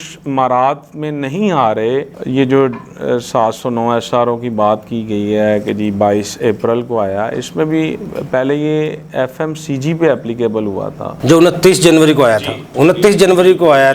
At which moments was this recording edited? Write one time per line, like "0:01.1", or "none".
none